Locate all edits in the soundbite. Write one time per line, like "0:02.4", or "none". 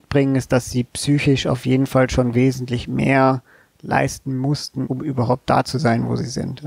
0:04.9